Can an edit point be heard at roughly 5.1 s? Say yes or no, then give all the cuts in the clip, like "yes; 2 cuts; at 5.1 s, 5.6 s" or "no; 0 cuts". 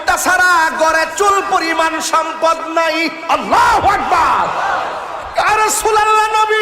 yes; 1 cut; at 5.1 s